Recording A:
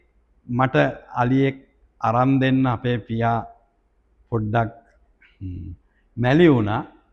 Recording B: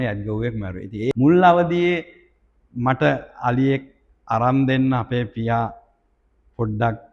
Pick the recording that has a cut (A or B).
B